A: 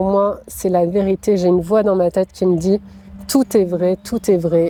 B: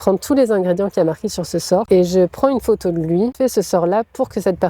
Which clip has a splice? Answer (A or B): B